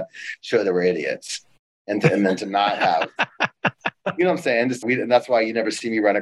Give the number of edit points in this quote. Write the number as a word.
one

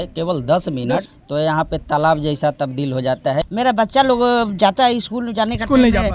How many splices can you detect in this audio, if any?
two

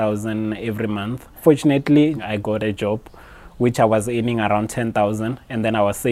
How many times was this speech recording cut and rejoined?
two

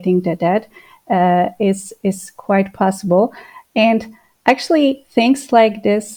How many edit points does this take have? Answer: zero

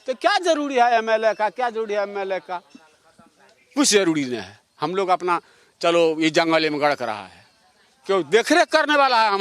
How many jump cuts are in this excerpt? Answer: zero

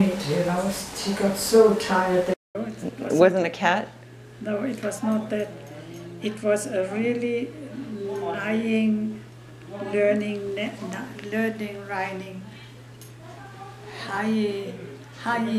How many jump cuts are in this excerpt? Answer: one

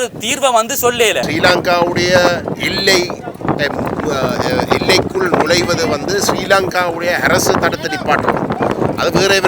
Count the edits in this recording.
one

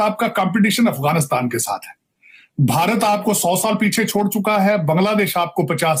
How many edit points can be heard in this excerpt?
zero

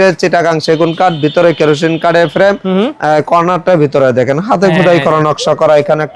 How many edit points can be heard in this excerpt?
zero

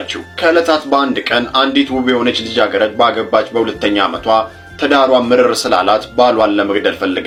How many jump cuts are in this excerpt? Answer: zero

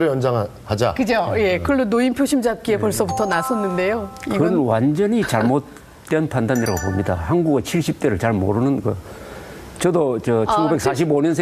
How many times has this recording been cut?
zero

